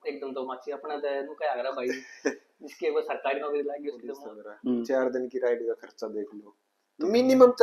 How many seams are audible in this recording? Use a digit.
1